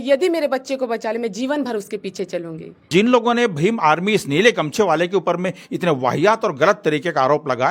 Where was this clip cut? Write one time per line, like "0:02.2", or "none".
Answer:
0:02.9